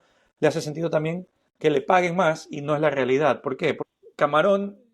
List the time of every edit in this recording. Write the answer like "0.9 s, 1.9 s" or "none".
3.8 s

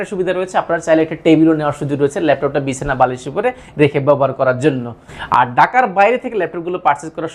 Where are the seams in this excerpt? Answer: none

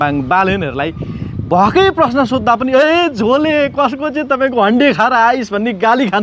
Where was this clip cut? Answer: none

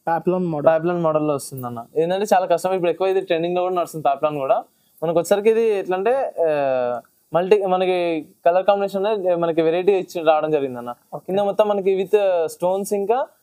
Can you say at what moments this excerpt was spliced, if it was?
none

